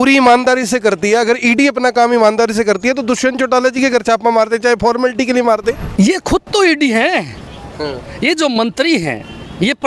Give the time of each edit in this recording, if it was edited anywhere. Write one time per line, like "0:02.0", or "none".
0:05.8